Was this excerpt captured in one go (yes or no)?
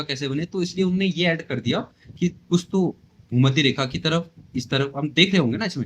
yes